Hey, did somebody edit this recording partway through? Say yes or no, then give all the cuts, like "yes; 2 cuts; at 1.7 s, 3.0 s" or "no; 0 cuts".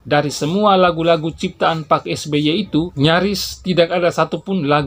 yes; 1 cut; at 2.9 s